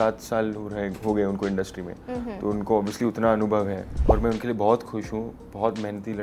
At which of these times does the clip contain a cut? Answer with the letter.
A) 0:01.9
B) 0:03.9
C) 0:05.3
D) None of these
B